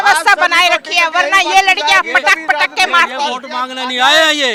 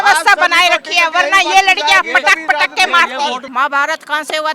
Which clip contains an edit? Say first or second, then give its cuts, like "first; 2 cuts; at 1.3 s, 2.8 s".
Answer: second; 1 cut; at 3.5 s